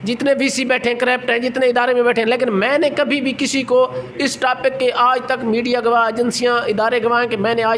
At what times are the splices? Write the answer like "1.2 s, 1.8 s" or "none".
none